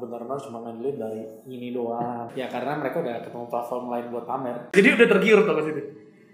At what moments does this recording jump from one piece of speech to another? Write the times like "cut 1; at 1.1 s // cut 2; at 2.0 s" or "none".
cut 1; at 2.3 s // cut 2; at 4.7 s